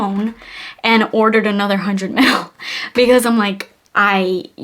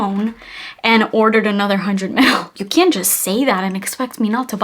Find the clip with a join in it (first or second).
second